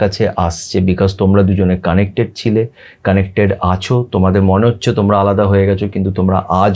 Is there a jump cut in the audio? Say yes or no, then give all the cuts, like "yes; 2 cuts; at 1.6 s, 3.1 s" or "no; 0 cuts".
no; 0 cuts